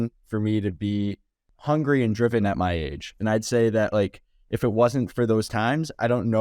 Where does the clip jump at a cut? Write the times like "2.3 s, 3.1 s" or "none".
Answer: none